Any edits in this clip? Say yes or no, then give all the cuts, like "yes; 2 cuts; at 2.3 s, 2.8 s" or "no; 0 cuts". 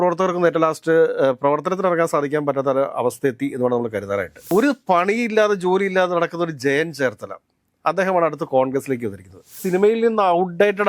yes; 2 cuts; at 4.5 s, 9.6 s